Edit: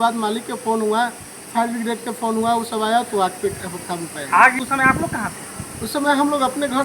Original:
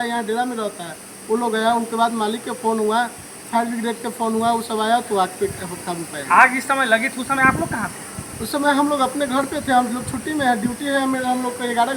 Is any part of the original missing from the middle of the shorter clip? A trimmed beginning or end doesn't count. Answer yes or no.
yes